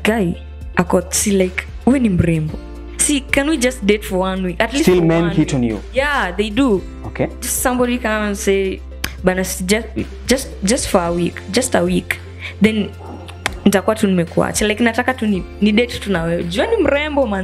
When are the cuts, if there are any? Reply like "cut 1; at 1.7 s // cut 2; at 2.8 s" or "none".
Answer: none